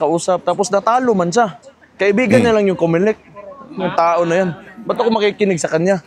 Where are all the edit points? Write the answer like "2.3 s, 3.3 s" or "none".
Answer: none

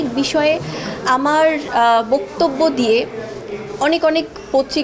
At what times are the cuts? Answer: none

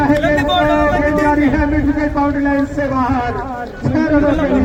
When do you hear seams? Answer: none

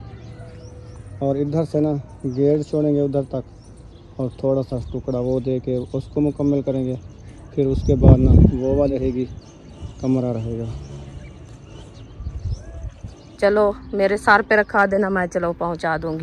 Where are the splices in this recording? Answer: 8.9 s, 13.3 s

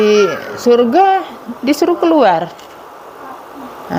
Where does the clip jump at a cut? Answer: none

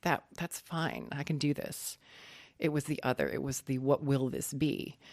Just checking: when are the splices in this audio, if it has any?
none

